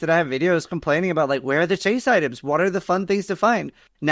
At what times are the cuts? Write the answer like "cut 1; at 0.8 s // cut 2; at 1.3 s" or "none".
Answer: none